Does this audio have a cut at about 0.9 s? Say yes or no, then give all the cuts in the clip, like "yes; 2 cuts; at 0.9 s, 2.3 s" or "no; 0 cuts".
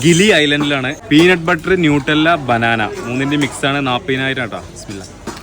yes; 1 cut; at 0.9 s